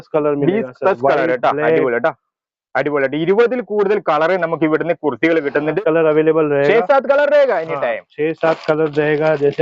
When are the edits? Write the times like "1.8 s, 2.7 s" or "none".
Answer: 5.8 s